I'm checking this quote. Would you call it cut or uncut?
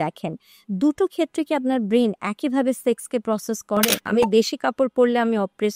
cut